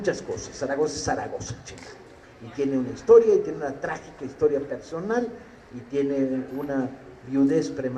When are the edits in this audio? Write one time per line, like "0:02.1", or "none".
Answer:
0:03.8